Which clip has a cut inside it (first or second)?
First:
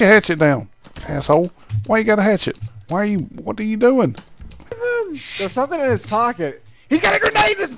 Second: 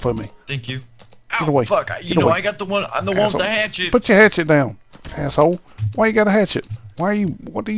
first